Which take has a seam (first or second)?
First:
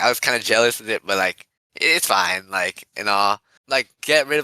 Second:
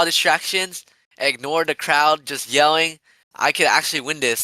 first